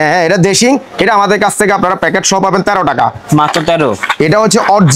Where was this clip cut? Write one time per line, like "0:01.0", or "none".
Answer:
none